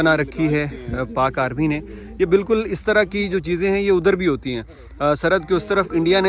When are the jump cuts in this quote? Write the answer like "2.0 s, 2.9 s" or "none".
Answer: none